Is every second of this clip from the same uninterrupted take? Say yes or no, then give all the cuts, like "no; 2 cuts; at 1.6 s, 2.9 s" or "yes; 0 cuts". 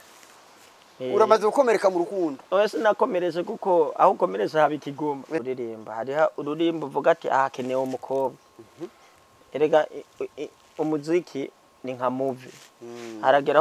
no; 1 cut; at 5.5 s